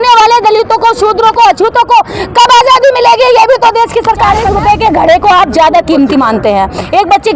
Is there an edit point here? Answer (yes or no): yes